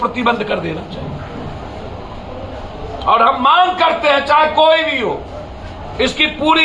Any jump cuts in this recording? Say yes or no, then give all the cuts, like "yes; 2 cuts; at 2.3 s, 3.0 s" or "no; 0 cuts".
no; 0 cuts